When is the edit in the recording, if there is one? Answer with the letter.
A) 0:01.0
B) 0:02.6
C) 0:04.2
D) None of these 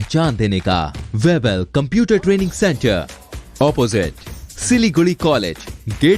A